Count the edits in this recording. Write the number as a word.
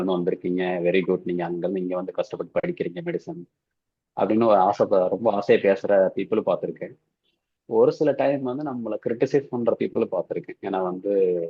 zero